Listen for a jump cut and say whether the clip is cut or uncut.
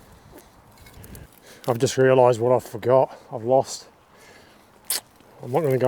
cut